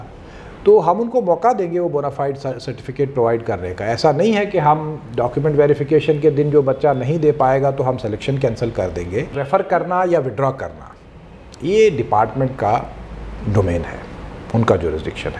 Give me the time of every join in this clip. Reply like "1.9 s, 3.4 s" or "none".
9.4 s